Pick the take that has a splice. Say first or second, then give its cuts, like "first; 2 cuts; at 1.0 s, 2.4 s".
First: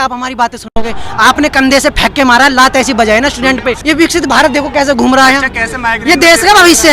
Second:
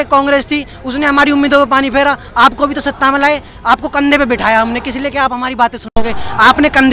first; 1 cut; at 3.8 s